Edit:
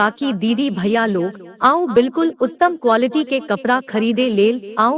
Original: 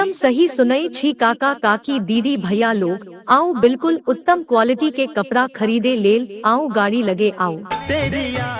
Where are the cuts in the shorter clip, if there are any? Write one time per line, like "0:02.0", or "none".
none